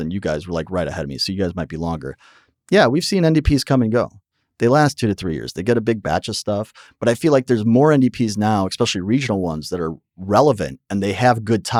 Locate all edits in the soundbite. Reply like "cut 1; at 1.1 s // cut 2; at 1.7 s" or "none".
none